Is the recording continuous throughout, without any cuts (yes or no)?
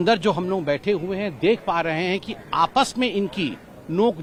yes